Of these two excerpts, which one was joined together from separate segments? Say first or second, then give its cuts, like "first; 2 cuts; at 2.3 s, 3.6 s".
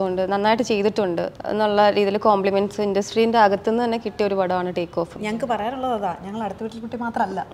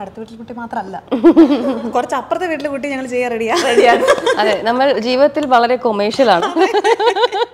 first; 2 cuts; at 1.4 s, 5.4 s